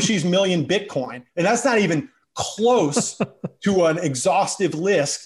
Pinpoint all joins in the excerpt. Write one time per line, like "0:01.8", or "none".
0:01.2